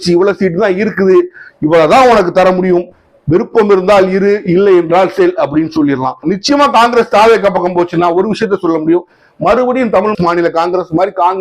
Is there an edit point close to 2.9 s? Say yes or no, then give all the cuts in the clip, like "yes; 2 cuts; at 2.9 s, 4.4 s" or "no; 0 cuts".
no; 1 cut; at 6.3 s